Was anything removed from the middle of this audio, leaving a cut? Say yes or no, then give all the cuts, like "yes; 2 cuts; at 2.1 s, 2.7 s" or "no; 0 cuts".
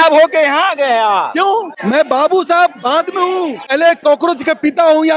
yes; 2 cuts; at 1.8 s, 3.7 s